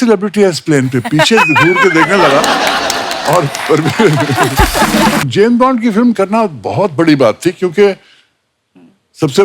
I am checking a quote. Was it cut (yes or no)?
yes